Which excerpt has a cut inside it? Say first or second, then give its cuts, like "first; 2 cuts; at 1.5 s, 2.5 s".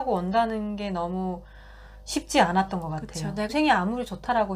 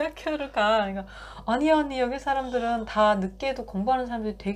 first; 1 cut; at 3.4 s